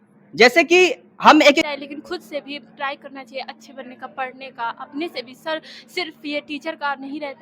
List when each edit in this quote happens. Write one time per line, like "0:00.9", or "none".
0:01.6